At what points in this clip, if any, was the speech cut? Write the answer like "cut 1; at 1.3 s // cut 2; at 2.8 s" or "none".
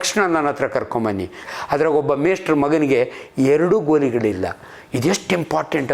cut 1; at 1.4 s